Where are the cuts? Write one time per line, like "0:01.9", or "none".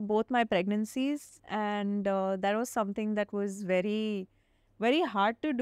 0:01.4